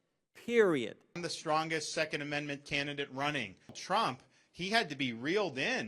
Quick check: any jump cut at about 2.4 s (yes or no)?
no